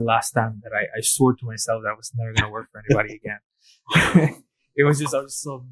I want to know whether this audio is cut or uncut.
uncut